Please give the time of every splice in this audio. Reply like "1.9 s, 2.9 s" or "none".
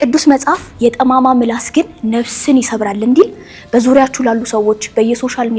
none